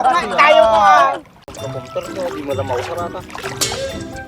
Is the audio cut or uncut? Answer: cut